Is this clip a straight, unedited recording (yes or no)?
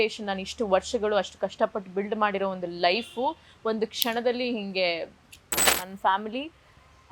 no